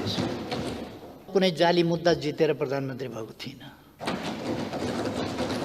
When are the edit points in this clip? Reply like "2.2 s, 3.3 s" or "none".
1.3 s